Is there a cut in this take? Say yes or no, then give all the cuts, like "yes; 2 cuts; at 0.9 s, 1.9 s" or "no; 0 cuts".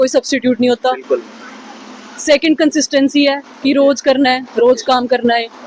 no; 0 cuts